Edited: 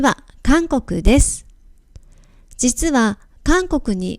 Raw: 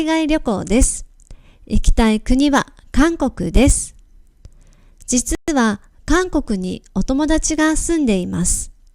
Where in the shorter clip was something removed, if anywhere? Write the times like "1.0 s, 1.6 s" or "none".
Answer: 2.9 s